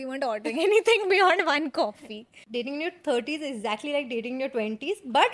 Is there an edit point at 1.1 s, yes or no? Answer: no